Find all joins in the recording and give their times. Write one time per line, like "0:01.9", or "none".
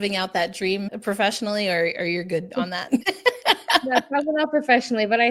0:00.9